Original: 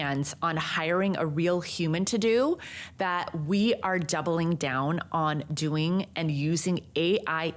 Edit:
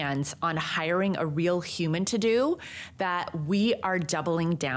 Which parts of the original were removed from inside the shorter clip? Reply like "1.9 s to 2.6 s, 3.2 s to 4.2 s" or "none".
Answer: none